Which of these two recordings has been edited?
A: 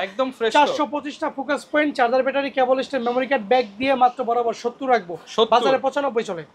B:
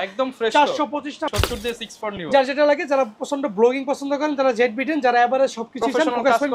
B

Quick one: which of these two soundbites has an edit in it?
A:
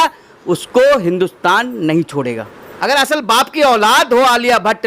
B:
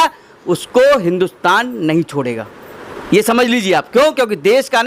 A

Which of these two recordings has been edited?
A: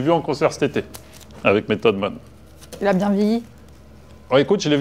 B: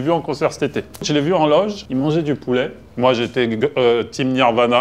B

